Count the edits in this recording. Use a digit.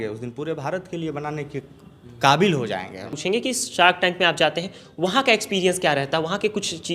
1